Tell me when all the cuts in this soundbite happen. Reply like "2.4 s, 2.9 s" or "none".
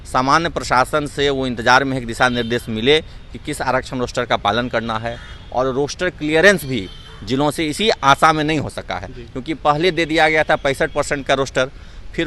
none

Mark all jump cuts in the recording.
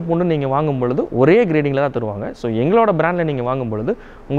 none

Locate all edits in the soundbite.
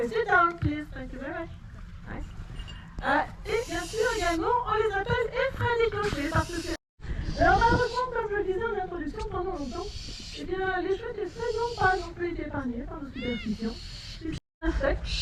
none

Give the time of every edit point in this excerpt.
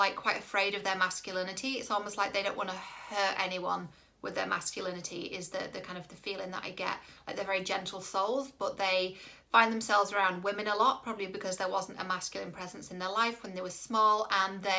none

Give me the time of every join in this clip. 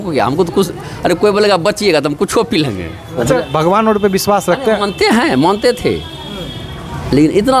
3.2 s

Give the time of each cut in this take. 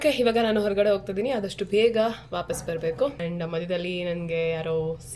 3.2 s

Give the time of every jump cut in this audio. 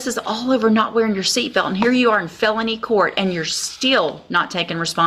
none

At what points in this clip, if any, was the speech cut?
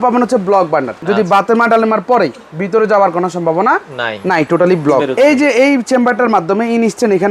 0.9 s, 5.1 s

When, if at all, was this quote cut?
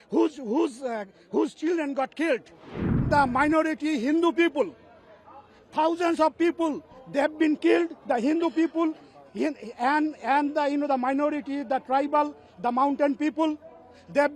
3.0 s

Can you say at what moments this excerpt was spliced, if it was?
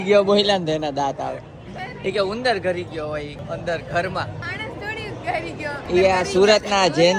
3.4 s, 4.4 s, 5.9 s

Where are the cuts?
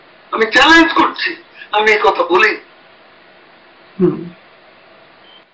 none

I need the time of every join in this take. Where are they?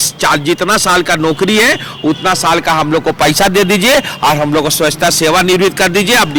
none

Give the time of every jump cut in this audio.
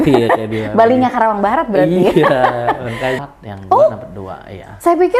3.2 s

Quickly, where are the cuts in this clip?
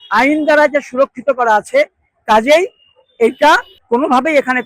3.7 s

